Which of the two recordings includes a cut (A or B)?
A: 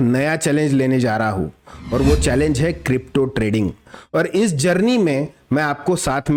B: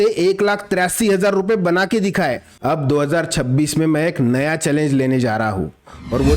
B